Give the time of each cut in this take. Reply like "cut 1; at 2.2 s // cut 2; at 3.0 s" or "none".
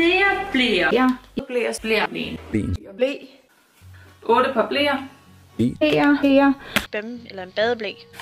cut 1; at 5.4 s